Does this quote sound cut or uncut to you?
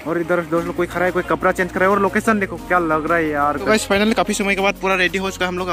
cut